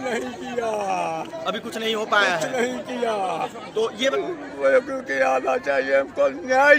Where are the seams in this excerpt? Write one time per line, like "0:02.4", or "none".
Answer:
0:04.1

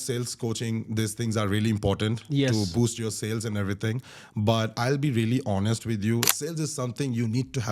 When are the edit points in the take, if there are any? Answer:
0:06.3

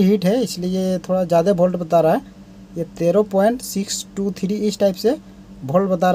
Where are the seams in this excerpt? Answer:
none

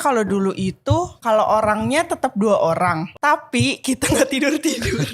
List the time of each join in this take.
0:01.1
0:03.1

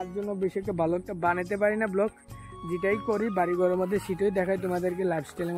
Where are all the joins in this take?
none

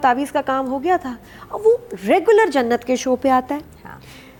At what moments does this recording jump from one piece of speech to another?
none

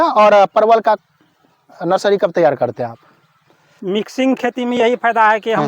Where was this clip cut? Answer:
0:03.6

